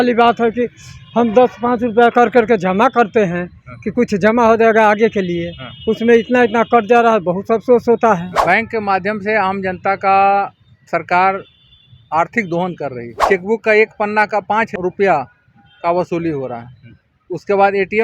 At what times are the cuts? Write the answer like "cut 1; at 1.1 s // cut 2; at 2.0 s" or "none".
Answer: cut 1; at 8.3 s // cut 2; at 13.1 s // cut 3; at 14.7 s